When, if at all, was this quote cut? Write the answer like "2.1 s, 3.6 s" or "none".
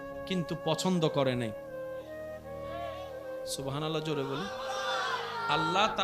1.7 s, 3.2 s